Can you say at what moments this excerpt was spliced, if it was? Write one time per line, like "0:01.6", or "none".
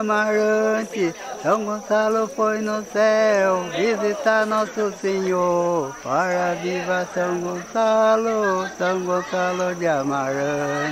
none